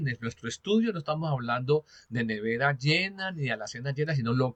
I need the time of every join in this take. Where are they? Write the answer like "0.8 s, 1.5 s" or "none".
none